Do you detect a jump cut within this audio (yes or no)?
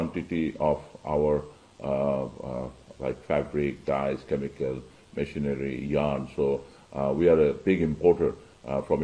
no